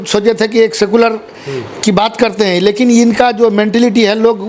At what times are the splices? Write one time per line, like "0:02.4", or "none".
none